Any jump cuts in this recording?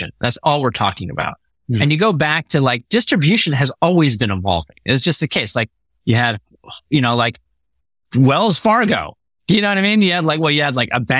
no; 0 cuts

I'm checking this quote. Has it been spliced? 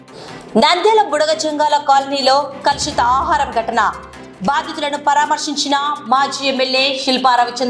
no; 0 cuts

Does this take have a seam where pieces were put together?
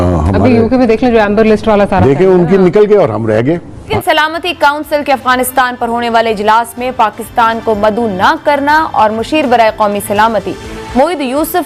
yes; 1 cut; at 3.9 s

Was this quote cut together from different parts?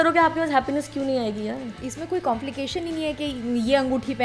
yes; 1 cut; at 1.8 s

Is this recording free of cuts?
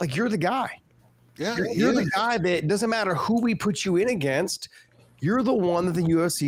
yes; 0 cuts

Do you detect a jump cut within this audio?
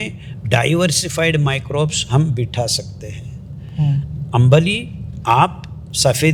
no; 0 cuts

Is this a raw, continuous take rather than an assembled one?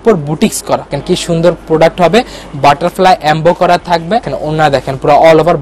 no; 2 cuts; at 0.9 s, 4.3 s

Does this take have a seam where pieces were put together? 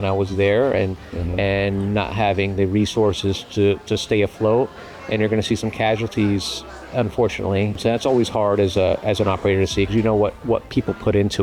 no; 0 cuts

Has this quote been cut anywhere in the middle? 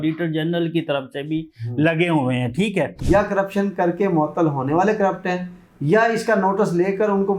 yes; 1 cut; at 3.0 s

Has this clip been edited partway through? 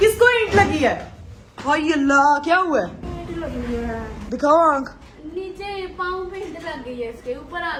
no; 0 cuts

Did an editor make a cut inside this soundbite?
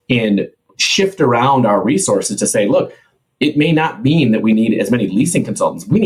no; 0 cuts

